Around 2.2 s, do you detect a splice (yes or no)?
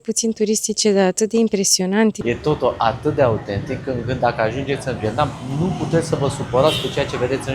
yes